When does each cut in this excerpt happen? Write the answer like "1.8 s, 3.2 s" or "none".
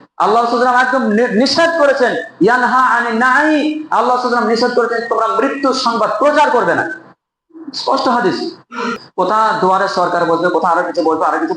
9.0 s